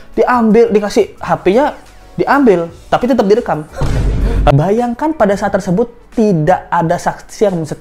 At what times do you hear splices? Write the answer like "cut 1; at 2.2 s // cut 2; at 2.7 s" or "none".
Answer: cut 1; at 4.5 s